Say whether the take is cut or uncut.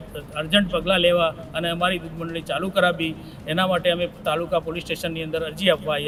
uncut